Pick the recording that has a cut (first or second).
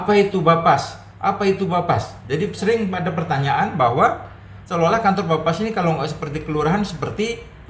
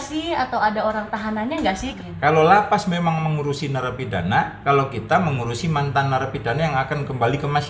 second